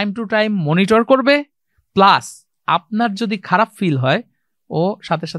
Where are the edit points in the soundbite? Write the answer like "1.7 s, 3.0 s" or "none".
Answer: none